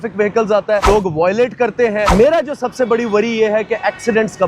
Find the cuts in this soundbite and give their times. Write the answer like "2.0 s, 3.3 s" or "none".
0.8 s, 2.1 s